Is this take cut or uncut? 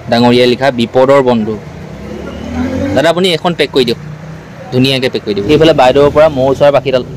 cut